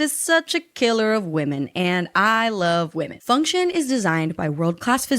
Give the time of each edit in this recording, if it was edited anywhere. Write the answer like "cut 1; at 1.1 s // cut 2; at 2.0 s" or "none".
cut 1; at 3.2 s